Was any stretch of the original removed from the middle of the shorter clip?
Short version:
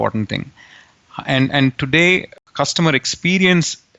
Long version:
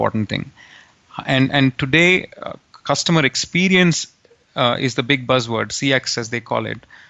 yes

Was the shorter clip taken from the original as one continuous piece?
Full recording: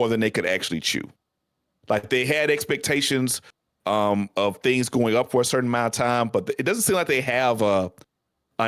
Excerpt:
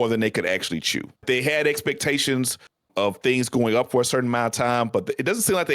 no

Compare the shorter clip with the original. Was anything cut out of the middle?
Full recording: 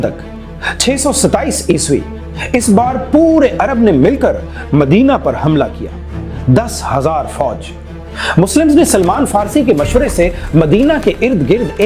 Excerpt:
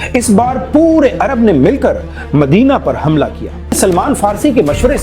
yes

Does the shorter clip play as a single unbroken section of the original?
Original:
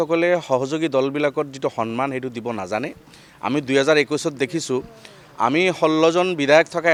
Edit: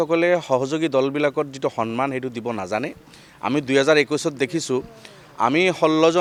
yes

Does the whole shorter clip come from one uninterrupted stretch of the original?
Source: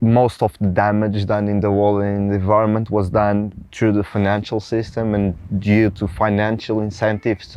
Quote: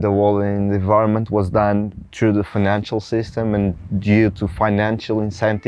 yes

